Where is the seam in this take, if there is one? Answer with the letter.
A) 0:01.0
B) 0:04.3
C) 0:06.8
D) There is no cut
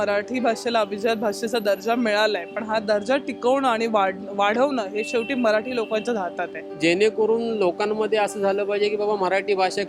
C